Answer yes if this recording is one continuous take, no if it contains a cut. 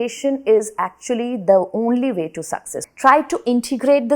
no